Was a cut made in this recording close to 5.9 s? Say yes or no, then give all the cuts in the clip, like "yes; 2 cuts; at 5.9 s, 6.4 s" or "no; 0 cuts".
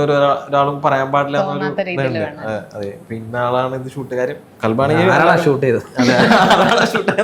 no; 1 cut; at 4.5 s